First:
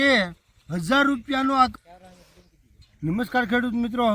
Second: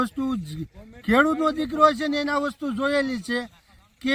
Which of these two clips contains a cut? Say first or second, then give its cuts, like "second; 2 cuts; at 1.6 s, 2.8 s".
first; 1 cut; at 1.7 s